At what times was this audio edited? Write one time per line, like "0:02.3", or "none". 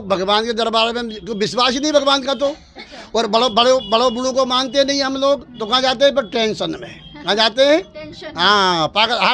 none